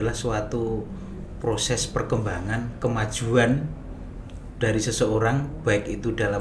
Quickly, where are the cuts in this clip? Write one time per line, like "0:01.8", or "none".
none